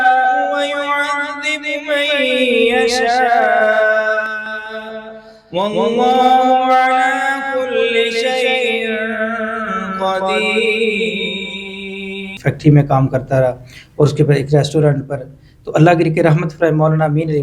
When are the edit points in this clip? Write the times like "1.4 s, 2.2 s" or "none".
12.3 s